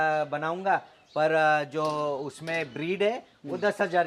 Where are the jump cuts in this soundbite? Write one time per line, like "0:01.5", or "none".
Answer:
none